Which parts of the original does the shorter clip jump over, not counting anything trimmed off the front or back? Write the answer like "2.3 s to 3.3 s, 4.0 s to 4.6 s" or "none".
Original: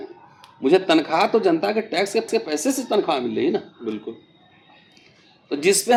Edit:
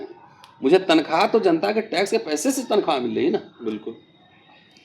2.1 s to 2.3 s